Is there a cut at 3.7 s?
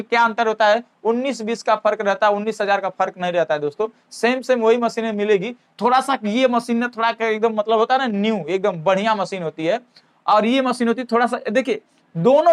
no; 0 cuts

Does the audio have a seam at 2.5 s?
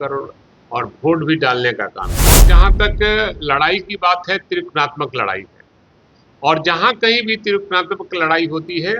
yes; 1 cut; at 2.5 s

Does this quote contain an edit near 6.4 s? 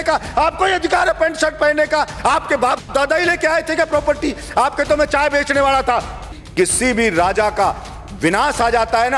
yes; 1 cut; at 6.4 s

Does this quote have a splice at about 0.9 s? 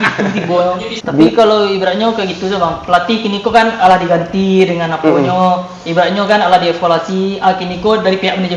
yes; 1 cut; at 0.9 s

